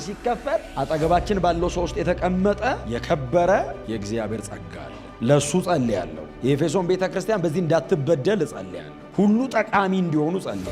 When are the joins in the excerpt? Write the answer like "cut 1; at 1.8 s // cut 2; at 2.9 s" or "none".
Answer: none